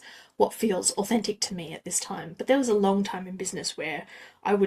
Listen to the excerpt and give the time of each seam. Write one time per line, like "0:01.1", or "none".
none